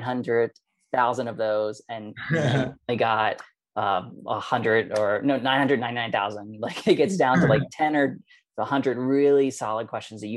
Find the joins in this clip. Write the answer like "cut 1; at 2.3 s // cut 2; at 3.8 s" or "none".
none